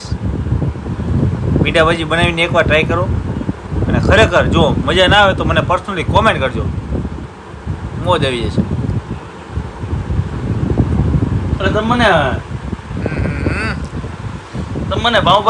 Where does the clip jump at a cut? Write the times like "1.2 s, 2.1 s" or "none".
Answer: none